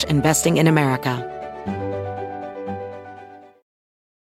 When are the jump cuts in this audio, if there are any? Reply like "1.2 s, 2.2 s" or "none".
1.2 s